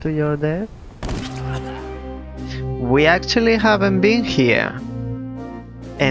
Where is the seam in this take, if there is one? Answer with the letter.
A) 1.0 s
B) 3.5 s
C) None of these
A